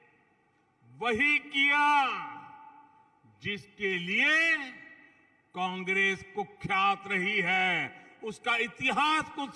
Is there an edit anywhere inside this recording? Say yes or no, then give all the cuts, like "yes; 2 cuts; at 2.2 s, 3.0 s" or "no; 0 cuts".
no; 0 cuts